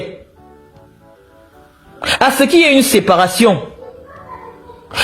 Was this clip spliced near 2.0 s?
no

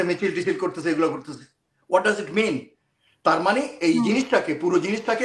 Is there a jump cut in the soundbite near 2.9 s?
no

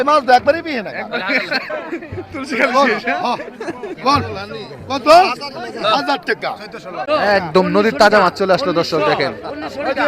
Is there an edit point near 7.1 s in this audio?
yes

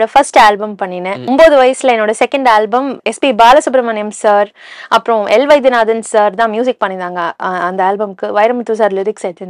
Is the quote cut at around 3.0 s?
yes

